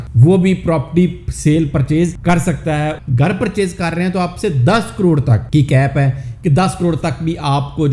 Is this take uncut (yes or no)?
no